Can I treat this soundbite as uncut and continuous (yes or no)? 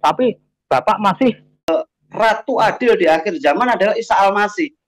no